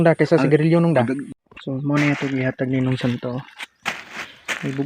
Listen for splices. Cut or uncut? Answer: cut